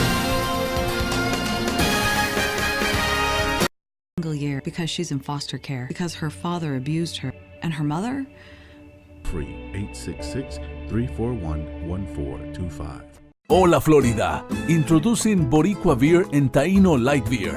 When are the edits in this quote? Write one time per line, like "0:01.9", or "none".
0:04.2
0:09.3
0:13.1